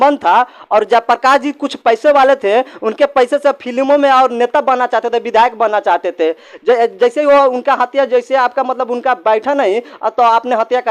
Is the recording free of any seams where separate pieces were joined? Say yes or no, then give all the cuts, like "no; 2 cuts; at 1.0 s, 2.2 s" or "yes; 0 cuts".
yes; 0 cuts